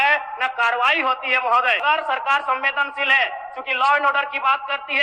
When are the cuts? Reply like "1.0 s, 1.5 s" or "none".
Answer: 1.8 s